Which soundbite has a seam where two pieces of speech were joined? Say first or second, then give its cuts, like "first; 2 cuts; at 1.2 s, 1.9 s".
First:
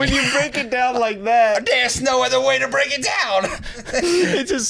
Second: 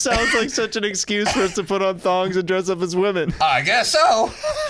first; 1 cut; at 3.8 s